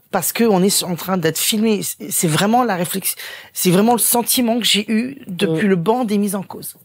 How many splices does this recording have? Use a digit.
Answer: 0